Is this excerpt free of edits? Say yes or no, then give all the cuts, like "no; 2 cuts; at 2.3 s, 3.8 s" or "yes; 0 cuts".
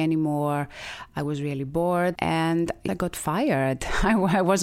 no; 1 cut; at 2.8 s